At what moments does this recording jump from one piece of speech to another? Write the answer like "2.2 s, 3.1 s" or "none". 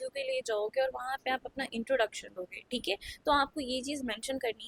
none